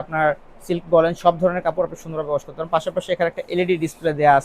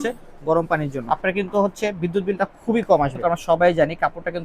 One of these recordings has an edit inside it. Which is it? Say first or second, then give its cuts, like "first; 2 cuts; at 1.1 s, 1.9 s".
second; 2 cuts; at 1.0 s, 3.1 s